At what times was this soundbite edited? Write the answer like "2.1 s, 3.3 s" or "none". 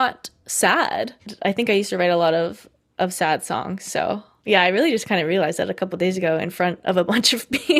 1.3 s